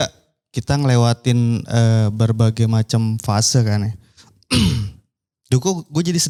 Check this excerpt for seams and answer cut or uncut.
uncut